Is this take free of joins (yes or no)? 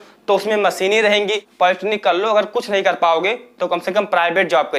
no